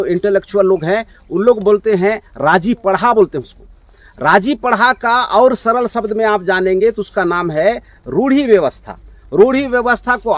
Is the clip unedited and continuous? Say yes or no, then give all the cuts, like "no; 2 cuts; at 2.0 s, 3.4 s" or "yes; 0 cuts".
yes; 0 cuts